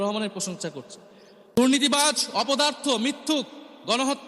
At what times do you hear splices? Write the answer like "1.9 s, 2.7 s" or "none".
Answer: 1.5 s